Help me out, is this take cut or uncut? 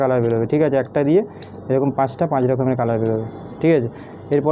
uncut